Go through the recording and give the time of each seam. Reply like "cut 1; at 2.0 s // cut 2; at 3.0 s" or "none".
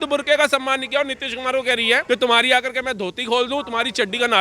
cut 1; at 2.0 s

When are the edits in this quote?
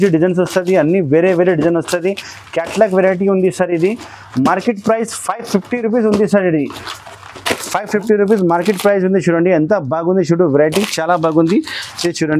none

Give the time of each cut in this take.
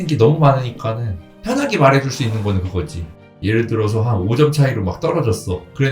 cut 1; at 3.2 s

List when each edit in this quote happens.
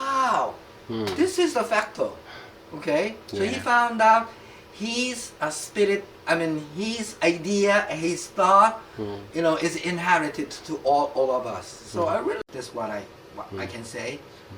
cut 1; at 12.4 s

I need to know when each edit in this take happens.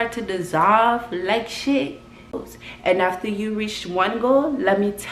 cut 1; at 2.4 s

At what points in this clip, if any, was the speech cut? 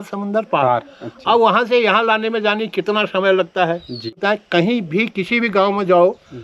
cut 1; at 4.2 s

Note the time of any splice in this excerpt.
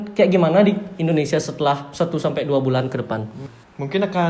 cut 1; at 3.4 s

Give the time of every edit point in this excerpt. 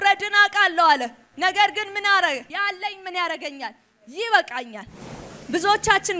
cut 1; at 1.2 s // cut 2; at 2.5 s // cut 3; at 5.3 s

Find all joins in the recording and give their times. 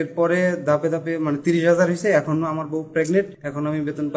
cut 1; at 3.0 s

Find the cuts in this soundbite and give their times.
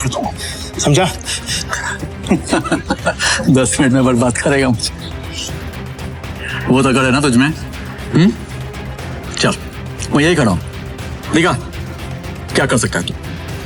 none

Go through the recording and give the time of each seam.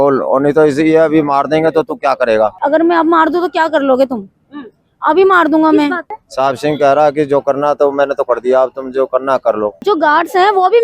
cut 1; at 2.6 s // cut 2; at 6.2 s // cut 3; at 9.8 s

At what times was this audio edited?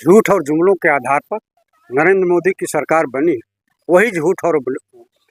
none

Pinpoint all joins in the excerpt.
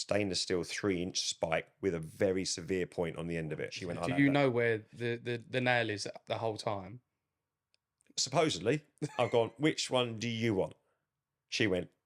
cut 1; at 3.8 s // cut 2; at 9.0 s

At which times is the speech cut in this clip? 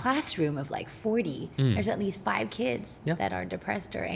none

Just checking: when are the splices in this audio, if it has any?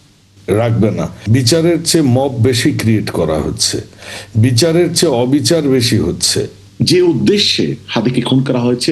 cut 1; at 1.2 s // cut 2; at 6.6 s

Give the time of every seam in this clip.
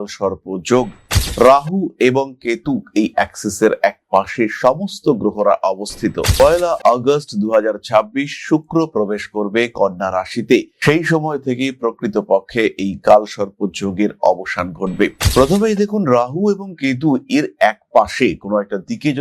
cut 1; at 15.2 s

